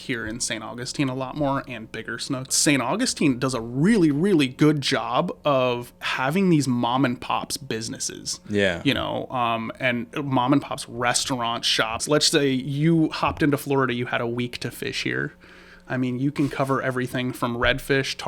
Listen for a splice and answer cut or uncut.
cut